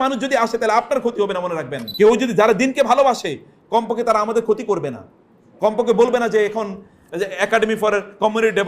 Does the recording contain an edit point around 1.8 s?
yes; 1 cut; at 1.8 s

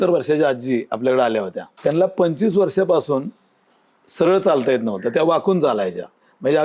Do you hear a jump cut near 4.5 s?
no; 1 cut; at 1.6 s

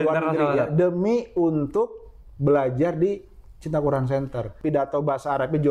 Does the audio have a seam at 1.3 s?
no; 1 cut; at 4.5 s

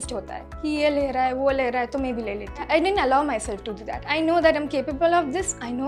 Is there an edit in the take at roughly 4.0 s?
yes; 2 cuts; at 2.6 s, 4.0 s

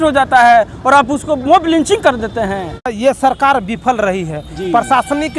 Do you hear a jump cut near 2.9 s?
yes; 1 cut; at 2.9 s

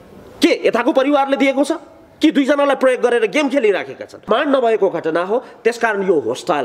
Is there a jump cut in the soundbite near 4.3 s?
yes; 1 cut; at 4.3 s

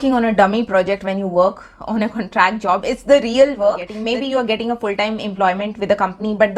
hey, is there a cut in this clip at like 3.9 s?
yes; 1 cut; at 3.9 s

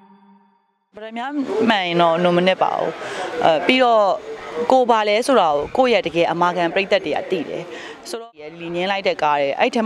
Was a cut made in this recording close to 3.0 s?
no; 2 cuts; at 1.1 s, 8.1 s

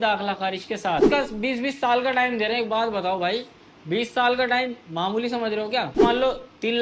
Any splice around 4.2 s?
no; 2 cuts; at 1.1 s, 6.0 s

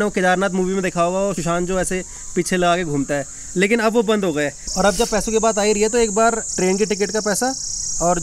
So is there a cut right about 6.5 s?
yes; 3 cuts; at 1.4 s, 4.6 s, 6.5 s

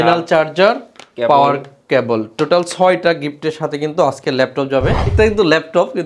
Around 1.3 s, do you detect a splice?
no; 1 cut; at 5.1 s

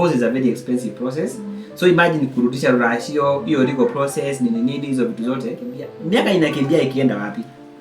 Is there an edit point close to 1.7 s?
no; 1 cut; at 5.9 s

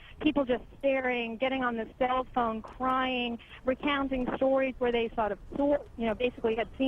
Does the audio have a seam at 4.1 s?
no; 1 cut; at 1.0 s

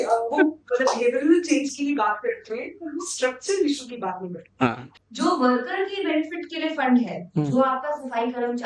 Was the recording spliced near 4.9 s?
yes; 1 cut; at 4.9 s

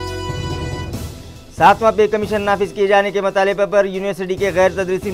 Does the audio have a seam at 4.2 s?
no; 1 cut; at 1.1 s

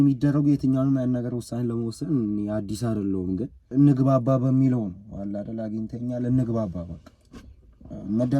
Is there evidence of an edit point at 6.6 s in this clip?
no; 1 cut; at 3.6 s

